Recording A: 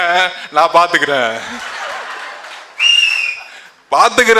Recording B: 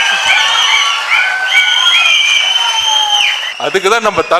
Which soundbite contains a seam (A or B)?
B